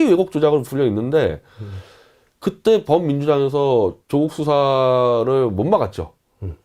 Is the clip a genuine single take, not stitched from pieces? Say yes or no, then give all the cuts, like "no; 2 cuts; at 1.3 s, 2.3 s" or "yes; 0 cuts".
yes; 0 cuts